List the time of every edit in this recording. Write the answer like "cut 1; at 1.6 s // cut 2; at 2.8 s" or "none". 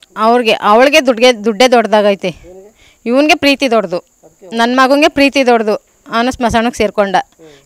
none